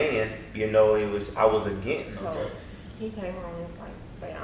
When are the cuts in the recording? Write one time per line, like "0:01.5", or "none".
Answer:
0:02.1

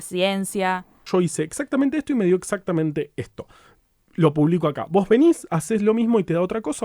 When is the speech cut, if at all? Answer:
0:01.1

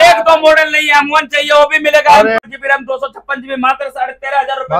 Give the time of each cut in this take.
0:02.4

